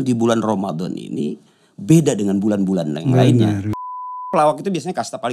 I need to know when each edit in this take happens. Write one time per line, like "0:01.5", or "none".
0:03.7